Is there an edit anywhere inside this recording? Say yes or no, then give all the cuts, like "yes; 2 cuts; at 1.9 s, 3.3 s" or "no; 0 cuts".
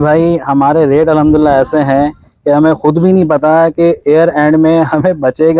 no; 0 cuts